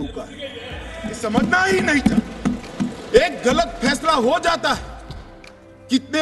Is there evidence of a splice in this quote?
yes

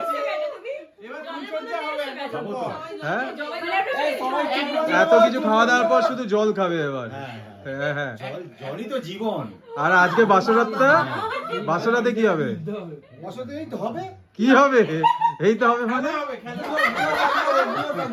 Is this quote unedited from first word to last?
yes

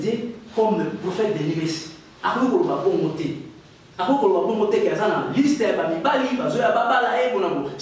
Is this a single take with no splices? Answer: yes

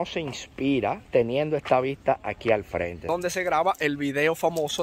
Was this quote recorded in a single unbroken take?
no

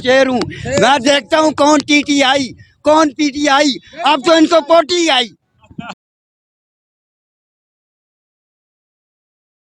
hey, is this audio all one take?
yes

